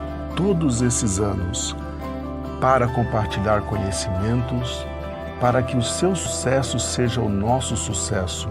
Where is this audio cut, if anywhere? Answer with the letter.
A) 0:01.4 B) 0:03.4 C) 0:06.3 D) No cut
C